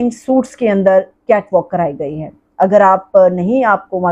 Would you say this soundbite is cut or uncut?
uncut